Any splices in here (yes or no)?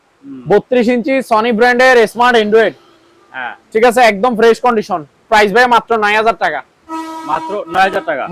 no